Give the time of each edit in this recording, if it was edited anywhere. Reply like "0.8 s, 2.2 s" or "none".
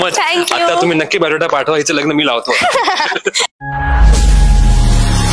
3.4 s

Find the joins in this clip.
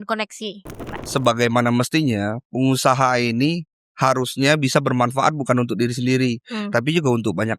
1.0 s

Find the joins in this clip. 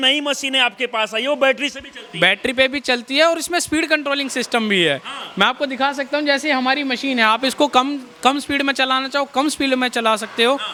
none

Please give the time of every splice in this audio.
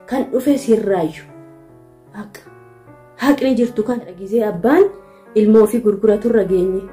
4.2 s

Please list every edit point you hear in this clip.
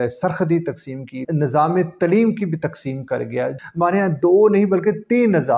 1.2 s, 3.6 s

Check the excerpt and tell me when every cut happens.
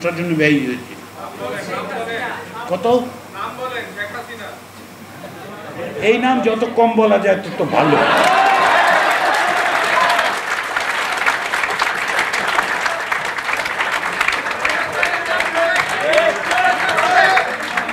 none

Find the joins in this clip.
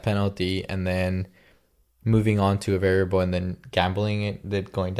none

